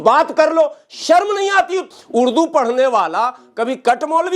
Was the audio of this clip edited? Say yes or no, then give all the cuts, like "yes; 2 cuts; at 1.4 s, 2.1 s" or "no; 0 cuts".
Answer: yes; 1 cut; at 1.9 s